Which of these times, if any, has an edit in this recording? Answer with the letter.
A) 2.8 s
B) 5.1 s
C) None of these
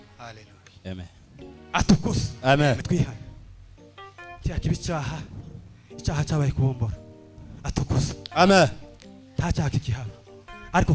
A